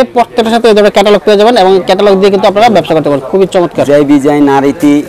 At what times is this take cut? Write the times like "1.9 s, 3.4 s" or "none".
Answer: none